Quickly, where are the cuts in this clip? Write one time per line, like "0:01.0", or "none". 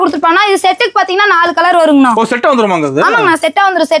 none